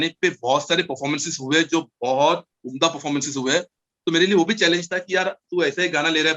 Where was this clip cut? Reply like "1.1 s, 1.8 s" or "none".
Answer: none